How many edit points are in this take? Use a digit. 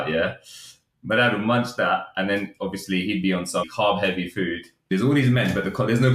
2